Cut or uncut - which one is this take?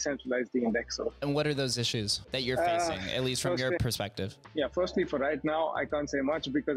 cut